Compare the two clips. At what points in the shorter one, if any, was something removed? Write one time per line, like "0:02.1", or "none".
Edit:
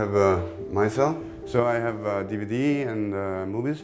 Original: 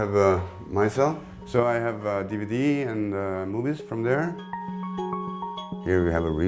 none